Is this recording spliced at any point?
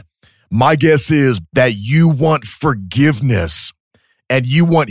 yes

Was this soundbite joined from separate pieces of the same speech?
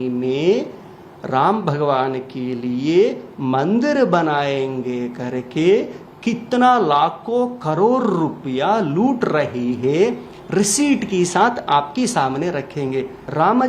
no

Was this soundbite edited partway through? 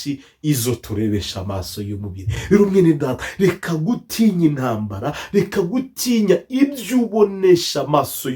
no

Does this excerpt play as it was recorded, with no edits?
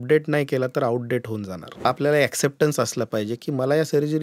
no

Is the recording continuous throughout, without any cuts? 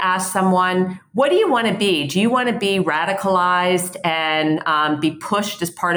yes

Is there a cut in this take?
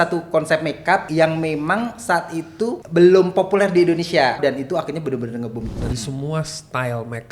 yes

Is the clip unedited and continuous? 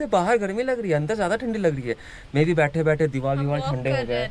yes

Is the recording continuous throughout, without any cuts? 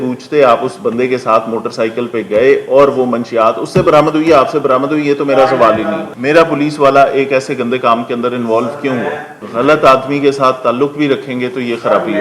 no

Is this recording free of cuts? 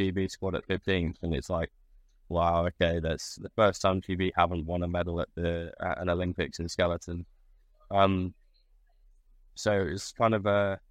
yes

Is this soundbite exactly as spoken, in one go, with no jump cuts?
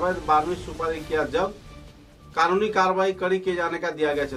yes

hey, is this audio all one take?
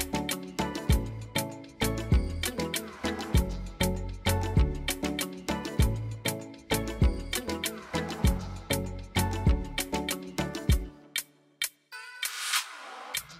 yes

